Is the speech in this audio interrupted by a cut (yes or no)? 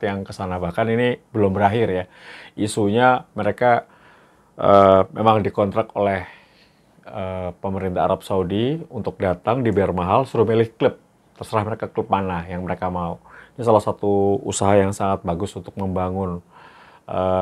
no